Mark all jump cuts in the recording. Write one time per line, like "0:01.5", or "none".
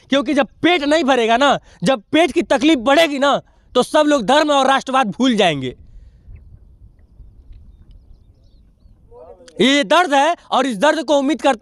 none